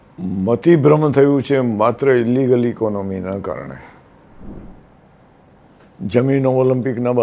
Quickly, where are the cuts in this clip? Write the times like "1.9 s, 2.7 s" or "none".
4.6 s